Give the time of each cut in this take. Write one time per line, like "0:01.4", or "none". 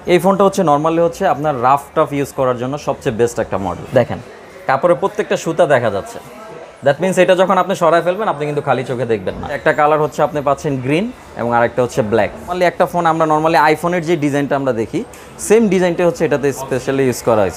0:03.8
0:09.6
0:12.5